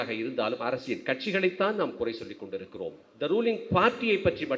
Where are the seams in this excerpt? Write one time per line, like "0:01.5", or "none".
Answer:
0:03.0